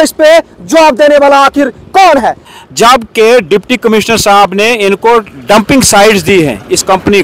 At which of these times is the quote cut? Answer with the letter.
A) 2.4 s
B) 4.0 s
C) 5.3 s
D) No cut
A